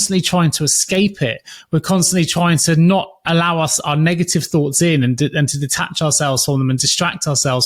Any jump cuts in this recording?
no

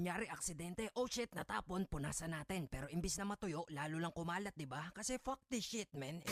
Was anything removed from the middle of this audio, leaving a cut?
no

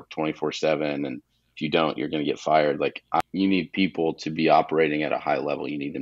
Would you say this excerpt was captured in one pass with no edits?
no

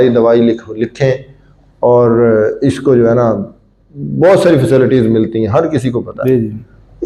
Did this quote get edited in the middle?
no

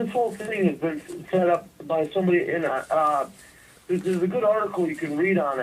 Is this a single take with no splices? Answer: no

